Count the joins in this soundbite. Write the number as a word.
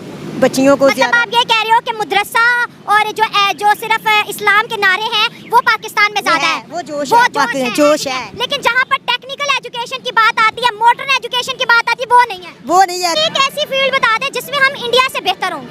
one